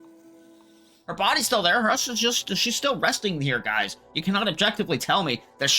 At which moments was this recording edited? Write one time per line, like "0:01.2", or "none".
0:01.0